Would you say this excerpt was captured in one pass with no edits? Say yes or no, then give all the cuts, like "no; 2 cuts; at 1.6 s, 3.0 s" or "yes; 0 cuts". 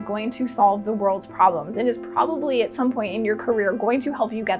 yes; 0 cuts